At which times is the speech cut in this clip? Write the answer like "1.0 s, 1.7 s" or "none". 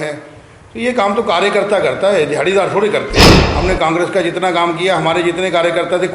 3.4 s

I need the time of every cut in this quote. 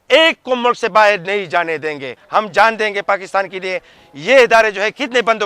2.1 s

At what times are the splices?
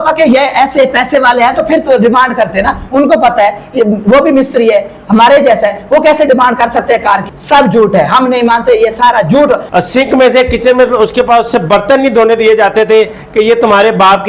7.3 s, 9.6 s

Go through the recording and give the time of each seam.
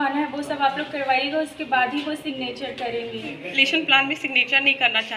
3.4 s

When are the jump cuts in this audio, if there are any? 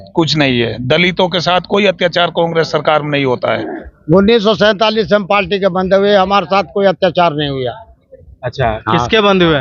3.9 s

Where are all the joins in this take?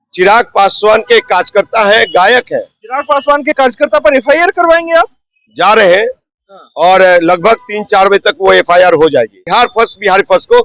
9.4 s

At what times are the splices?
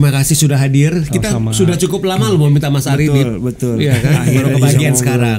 none

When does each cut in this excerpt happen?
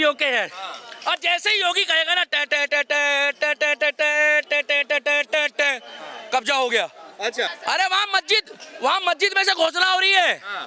7.5 s

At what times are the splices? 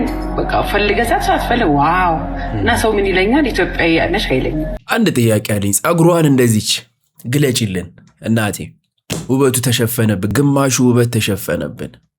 4.8 s, 10.3 s

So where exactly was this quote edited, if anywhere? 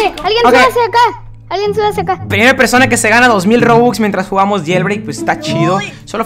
none

